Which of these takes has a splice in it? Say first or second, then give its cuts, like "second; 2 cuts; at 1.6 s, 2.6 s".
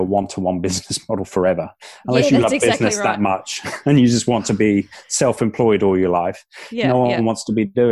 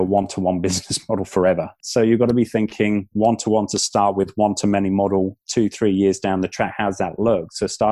second; 2 cuts; at 1.8 s, 5.4 s